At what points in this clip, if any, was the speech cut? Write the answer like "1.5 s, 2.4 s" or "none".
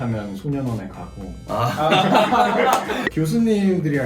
3.0 s

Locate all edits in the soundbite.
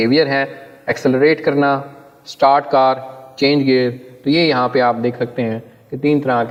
none

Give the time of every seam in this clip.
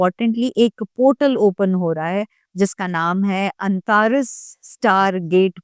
none

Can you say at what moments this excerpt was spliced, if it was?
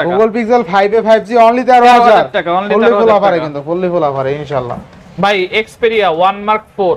none

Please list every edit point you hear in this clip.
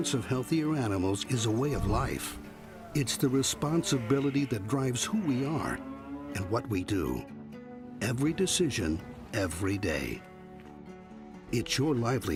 none

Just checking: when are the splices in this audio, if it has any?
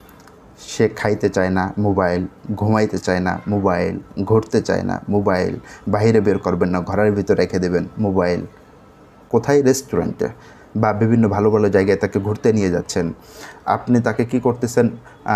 9.2 s

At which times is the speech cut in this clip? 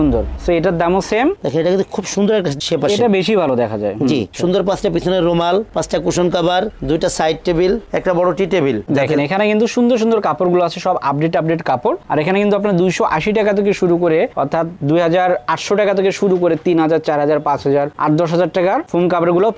1.4 s, 4.3 s, 8.8 s

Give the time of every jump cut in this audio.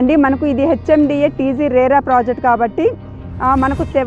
none

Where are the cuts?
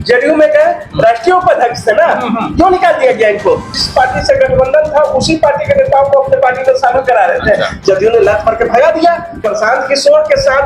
3.7 s, 9.4 s

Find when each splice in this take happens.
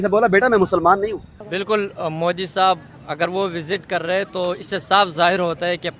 1.4 s

